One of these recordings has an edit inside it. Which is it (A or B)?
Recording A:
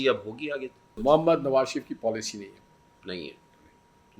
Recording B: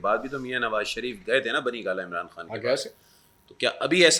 A